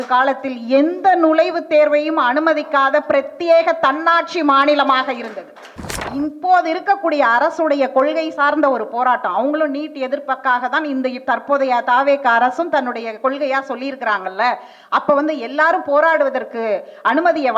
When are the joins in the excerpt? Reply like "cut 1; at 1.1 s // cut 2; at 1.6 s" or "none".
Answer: cut 1; at 6.0 s